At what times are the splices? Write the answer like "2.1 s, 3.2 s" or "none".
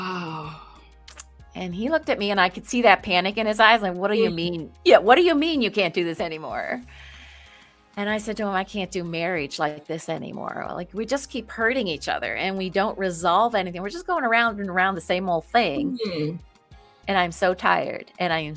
none